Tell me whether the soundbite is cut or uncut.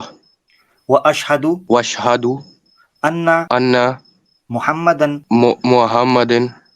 cut